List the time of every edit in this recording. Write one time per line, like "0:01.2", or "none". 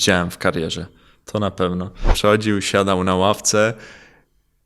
0:02.1